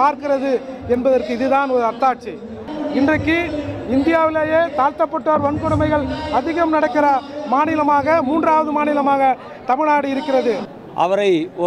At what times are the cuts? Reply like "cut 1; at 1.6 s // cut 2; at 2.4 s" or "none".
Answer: cut 1; at 2.7 s // cut 2; at 10.7 s